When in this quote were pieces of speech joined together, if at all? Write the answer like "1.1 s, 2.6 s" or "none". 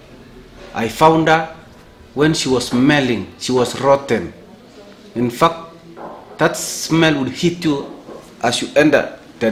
none